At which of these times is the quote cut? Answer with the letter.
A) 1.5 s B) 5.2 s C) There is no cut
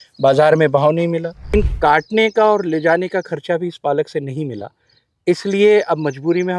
A